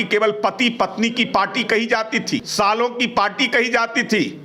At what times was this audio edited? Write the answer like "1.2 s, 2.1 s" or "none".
2.5 s